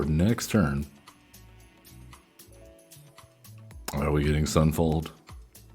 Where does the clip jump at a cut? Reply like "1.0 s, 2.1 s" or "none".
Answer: none